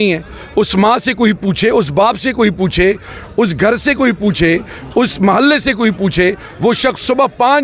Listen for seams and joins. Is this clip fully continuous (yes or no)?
yes